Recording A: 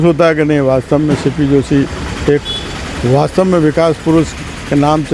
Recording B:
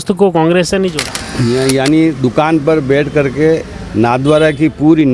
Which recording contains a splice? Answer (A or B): B